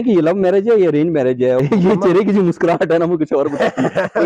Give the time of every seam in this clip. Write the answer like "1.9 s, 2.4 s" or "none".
1.6 s